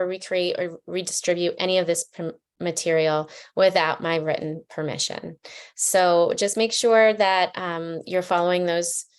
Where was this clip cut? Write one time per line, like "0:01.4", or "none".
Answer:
none